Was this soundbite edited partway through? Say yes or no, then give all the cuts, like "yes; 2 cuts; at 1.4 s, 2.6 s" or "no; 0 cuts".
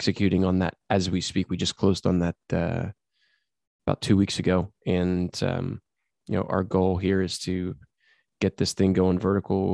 no; 0 cuts